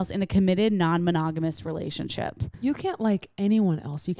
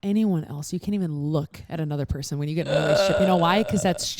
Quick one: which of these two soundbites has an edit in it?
first; 1 cut; at 2.5 s

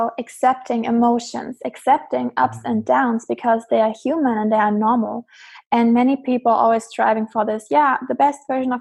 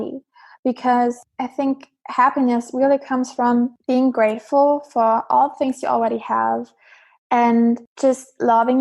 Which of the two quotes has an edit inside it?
second; 3 cuts; at 1.2 s, 3.8 s, 7.9 s

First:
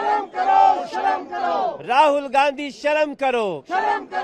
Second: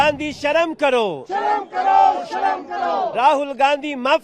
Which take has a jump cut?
second; 1 cut; at 3.1 s

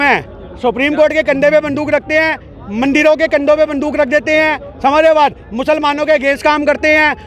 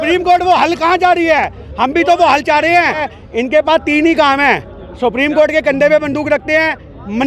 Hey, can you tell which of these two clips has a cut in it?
second; 1 cut; at 3.1 s

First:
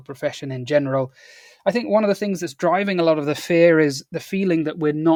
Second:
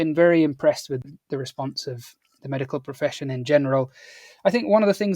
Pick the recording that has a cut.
second; 1 cut; at 1.0 s

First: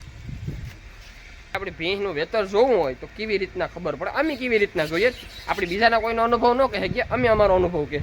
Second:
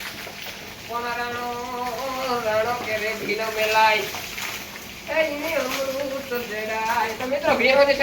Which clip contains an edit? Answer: first; 1 cut; at 1.5 s

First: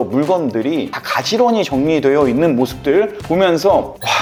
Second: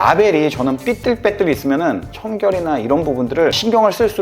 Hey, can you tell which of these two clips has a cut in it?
second; 1 cut; at 2.0 s

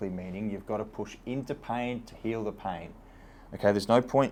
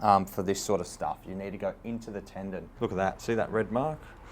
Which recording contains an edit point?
second; 1 cut; at 2.7 s

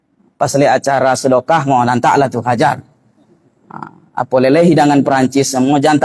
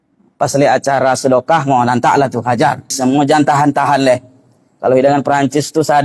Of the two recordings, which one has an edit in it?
second; 1 cut; at 3.0 s

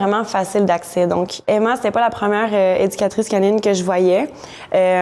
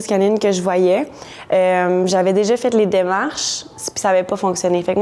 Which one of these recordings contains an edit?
first; 1 cut; at 1.4 s

